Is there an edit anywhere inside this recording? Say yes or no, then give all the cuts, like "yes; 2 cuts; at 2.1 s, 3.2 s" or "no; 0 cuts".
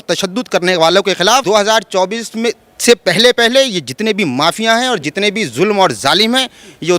yes; 1 cut; at 1.4 s